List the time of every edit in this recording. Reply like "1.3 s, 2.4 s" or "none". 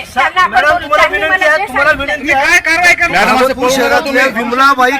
3.1 s